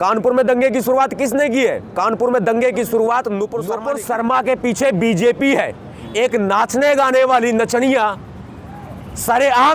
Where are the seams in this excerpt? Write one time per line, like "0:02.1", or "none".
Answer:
0:03.7

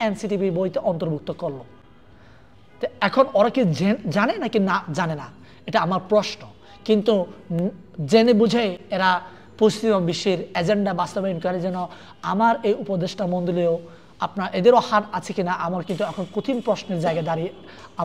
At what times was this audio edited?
none

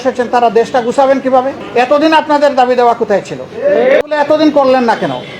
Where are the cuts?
0:01.6
0:04.0

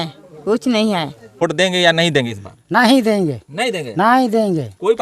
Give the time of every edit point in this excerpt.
0:01.4

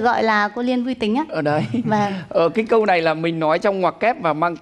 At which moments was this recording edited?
none

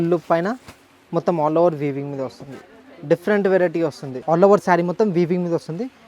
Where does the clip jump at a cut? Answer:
0:04.1

